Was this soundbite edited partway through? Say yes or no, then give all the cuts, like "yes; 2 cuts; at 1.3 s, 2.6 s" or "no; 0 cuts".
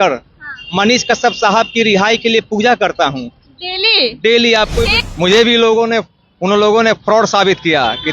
yes; 1 cut; at 5.0 s